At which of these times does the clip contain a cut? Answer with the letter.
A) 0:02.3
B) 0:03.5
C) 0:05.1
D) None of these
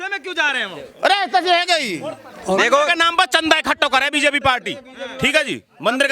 A